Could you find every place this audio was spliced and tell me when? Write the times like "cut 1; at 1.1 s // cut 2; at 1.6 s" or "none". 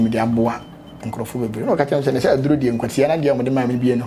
none

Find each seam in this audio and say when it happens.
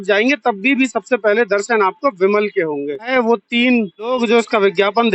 cut 1; at 3.1 s // cut 2; at 4.0 s

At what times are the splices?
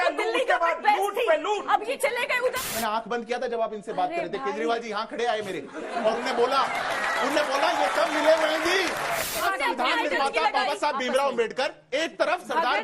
cut 1; at 2.3 s // cut 2; at 9.4 s

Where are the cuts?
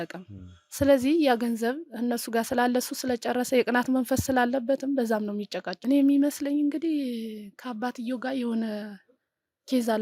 cut 1; at 5.7 s

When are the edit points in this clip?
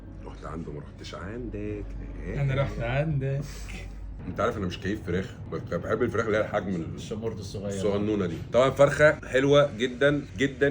cut 1; at 8.4 s

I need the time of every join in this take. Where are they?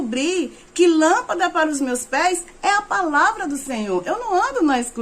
none

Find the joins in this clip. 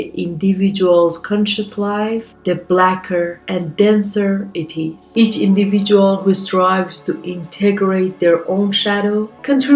cut 1; at 5.0 s

